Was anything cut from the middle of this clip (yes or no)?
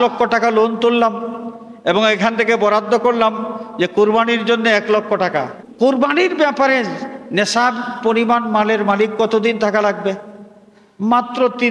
yes